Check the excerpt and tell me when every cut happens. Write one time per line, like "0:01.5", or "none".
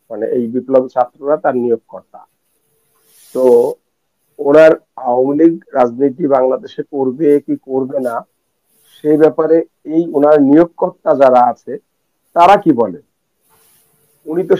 none